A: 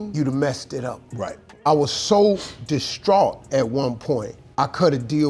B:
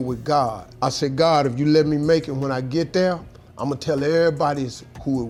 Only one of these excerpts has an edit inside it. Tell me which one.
A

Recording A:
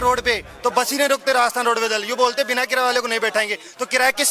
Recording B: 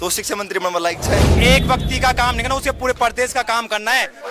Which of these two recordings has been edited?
B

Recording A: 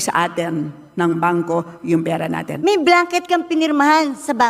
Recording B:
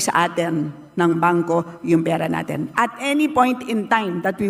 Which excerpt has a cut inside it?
A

